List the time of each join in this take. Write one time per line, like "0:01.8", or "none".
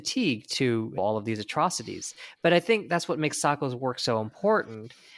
0:01.0